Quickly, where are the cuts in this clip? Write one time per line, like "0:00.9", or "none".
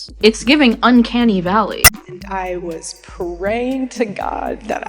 0:01.8